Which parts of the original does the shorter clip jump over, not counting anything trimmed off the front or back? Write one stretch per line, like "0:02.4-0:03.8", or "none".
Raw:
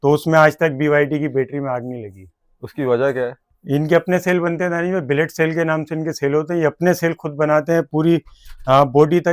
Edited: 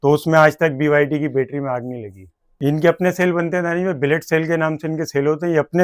0:02.4-0:03.5

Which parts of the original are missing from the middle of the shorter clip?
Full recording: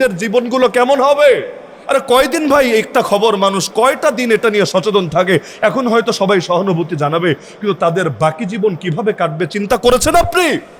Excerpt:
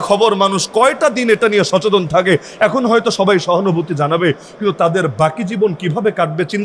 none

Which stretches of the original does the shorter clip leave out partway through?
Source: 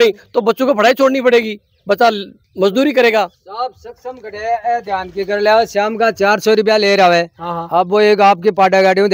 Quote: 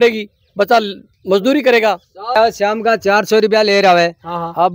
0:03.7-0:05.5

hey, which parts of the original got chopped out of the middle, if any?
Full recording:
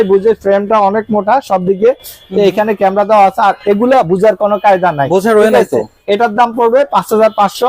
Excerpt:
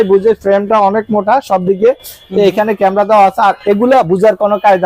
none

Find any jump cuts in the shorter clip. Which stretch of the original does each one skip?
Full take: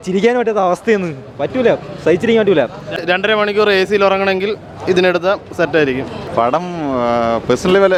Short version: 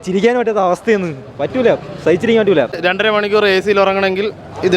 0:02.7-0:02.9

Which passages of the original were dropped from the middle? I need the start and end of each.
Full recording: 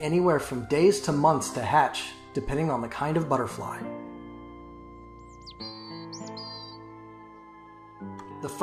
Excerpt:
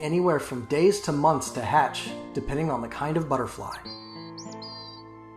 0:03.8-0:05.5

